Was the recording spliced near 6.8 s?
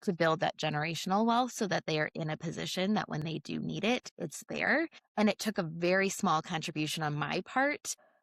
no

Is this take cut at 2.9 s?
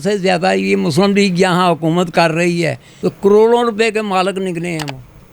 yes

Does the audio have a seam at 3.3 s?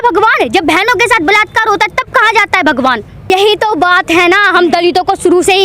yes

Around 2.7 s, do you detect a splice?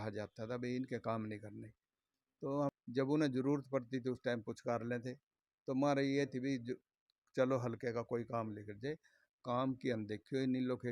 yes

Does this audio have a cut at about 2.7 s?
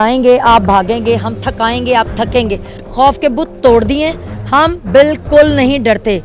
yes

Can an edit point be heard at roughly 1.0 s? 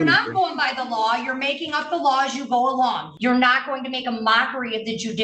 no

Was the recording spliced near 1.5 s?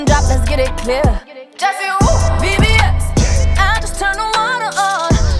no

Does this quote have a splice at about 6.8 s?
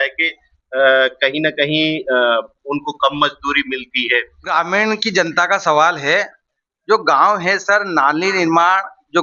no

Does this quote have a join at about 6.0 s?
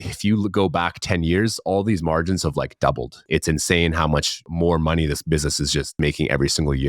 yes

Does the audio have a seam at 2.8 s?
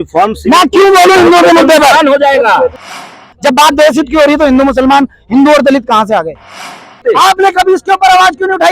yes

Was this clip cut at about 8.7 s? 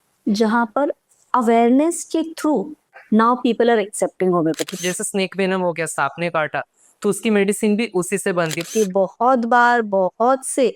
yes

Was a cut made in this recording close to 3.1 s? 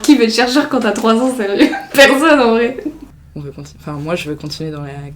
yes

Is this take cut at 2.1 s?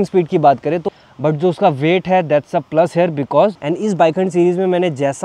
no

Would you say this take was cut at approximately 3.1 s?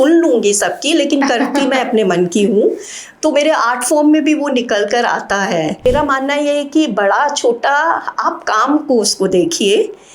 no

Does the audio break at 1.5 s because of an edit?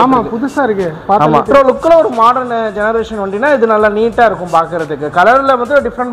yes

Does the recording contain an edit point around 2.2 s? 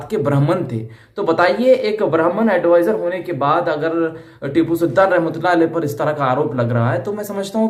no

